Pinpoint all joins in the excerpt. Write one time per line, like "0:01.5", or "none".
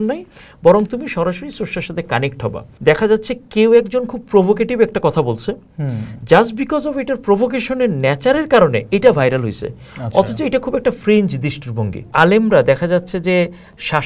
0:02.7
0:12.1